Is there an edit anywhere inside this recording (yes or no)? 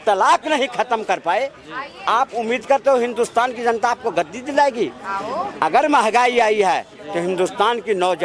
no